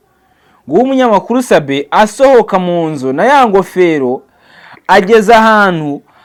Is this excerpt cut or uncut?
uncut